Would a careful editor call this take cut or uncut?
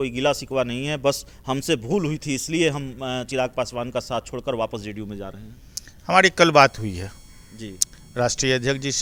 uncut